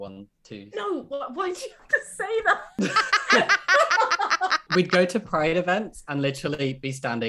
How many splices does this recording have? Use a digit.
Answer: 2